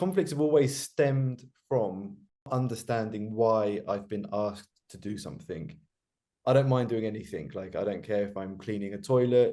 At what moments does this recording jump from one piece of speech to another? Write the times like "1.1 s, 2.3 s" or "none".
2.5 s